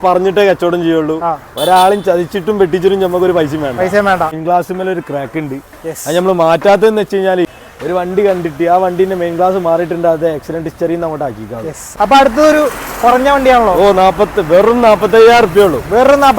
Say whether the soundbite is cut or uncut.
cut